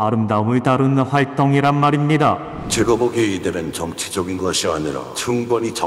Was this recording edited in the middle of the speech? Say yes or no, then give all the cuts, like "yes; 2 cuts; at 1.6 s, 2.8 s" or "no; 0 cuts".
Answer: yes; 1 cut; at 2.7 s